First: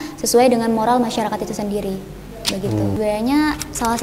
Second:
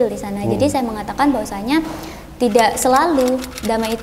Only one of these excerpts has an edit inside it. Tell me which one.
first; 1 cut; at 3.0 s

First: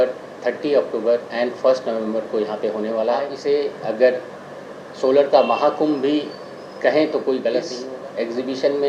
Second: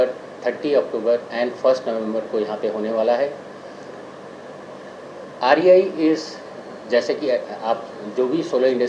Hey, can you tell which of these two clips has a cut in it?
first; 2 cuts; at 3.3 s, 7.4 s

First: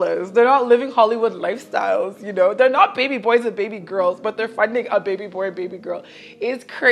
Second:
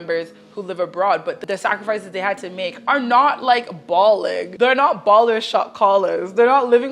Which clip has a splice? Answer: second; 2 cuts; at 1.4 s, 4.4 s

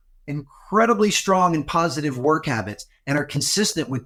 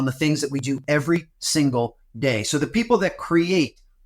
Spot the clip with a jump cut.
second; 1 cut; at 1.4 s

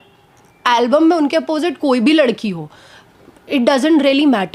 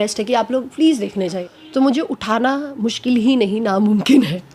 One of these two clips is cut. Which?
second; 1 cut; at 1.5 s

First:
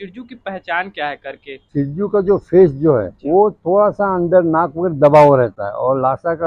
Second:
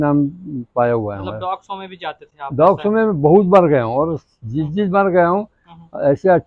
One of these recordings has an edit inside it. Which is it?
first; 2 cuts; at 1.6 s, 3.1 s

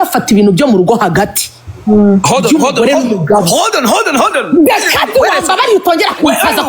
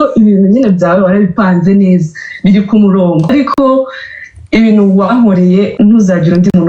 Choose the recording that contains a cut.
second; 2 cuts; at 3.3 s, 5.7 s

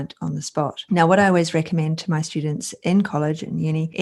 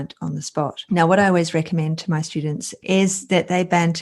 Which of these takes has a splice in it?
second; 1 cut; at 2.8 s

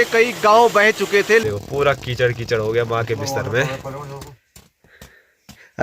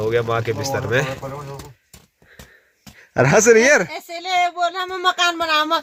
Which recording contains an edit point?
first; 1 cut; at 1.4 s

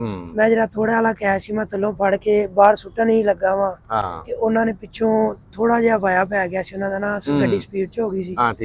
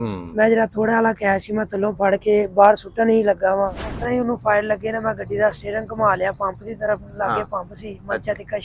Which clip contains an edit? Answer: second; 1 cut; at 3.9 s

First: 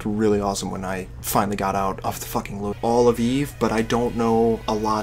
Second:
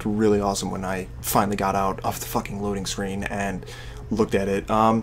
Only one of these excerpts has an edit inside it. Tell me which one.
second; 1 cut; at 2.7 s

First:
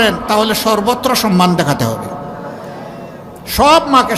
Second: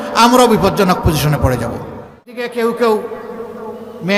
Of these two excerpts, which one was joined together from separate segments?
second; 1 cut; at 2.4 s

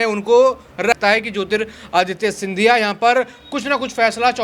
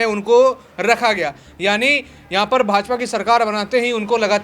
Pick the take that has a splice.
first; 1 cut; at 1.0 s

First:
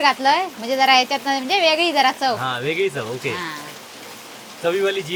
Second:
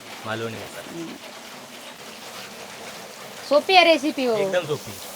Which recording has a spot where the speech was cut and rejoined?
second; 1 cut; at 2.0 s

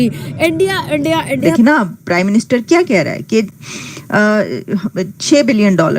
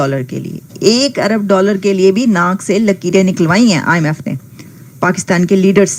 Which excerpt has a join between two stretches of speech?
first; 1 cut; at 1.5 s

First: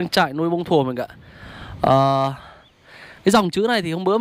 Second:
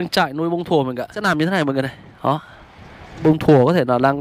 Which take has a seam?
second; 2 cuts; at 1.2 s, 3.2 s

